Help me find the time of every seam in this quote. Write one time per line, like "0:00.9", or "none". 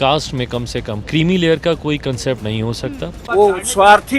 0:01.0
0:03.2